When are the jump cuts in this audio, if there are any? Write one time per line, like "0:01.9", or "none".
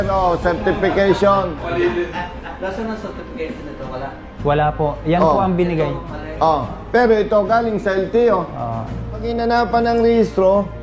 0:09.3